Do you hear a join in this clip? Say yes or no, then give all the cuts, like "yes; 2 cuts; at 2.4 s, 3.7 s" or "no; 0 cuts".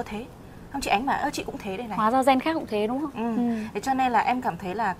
no; 0 cuts